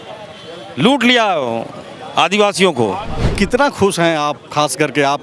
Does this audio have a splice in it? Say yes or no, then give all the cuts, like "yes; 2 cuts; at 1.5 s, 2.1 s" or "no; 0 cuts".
yes; 1 cut; at 3.3 s